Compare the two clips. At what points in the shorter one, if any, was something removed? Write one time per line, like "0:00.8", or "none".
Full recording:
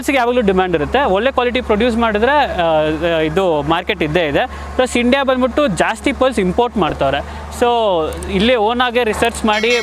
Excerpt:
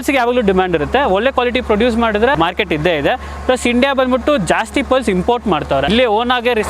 0:02.3
0:05.9